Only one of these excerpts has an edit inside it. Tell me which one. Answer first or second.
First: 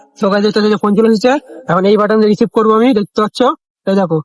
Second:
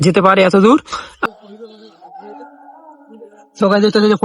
second